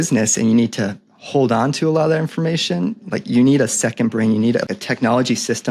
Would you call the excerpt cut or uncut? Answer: cut